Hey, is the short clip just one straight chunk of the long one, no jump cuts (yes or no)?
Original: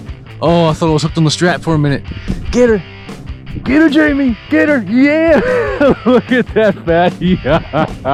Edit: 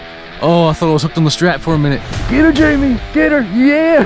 no